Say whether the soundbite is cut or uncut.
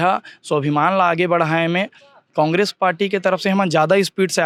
uncut